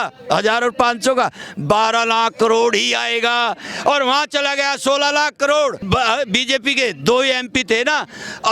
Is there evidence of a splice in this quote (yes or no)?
yes